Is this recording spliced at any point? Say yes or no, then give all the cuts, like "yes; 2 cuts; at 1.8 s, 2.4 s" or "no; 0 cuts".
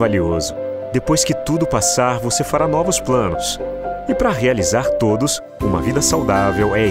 no; 0 cuts